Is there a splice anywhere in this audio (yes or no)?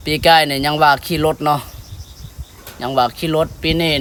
no